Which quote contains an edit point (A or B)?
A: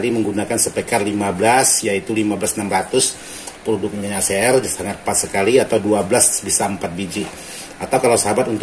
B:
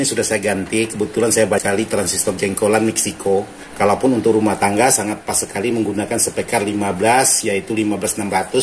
B